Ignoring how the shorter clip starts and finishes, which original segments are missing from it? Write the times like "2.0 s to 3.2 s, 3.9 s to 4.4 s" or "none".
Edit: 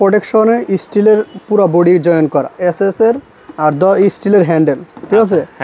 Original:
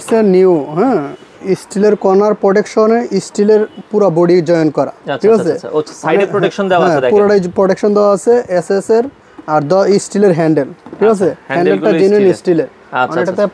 5.0 s to 8.5 s